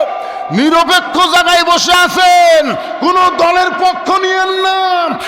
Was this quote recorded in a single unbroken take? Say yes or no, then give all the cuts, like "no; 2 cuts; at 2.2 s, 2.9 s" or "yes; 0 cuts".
yes; 0 cuts